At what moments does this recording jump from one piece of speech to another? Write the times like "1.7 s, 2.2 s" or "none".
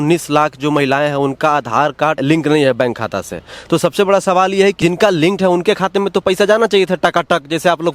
2.2 s, 4.8 s